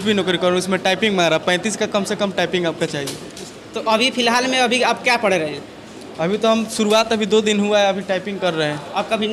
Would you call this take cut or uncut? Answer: uncut